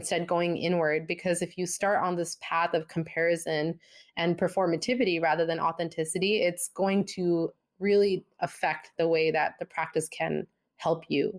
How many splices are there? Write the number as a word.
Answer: zero